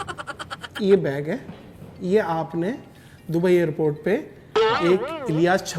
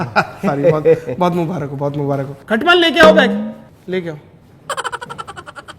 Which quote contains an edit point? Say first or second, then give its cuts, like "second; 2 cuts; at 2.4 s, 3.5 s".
second; 1 cut; at 2.3 s